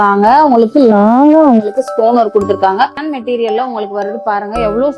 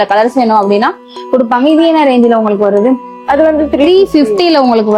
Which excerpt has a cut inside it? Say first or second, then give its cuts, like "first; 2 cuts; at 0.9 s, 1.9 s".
first; 1 cut; at 3.1 s